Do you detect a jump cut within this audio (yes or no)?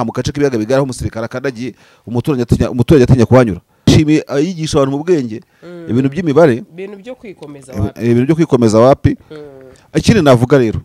yes